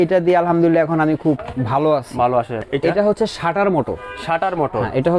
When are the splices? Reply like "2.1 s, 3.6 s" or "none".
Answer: 2.6 s